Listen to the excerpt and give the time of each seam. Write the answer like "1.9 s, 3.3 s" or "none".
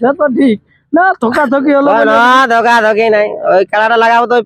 none